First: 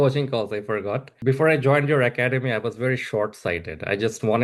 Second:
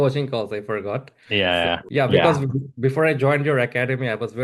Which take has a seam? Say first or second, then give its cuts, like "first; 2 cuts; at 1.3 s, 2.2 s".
first; 1 cut; at 1.1 s